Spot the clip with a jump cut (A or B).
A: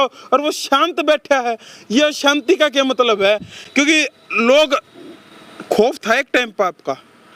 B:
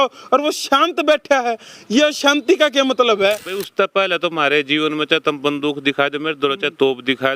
B